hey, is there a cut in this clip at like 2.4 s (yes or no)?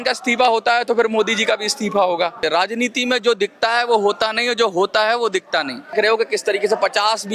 yes